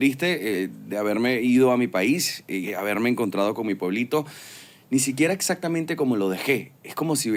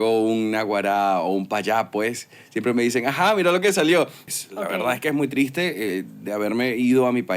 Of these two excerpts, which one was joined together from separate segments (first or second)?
second